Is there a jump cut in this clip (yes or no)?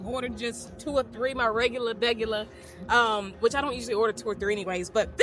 no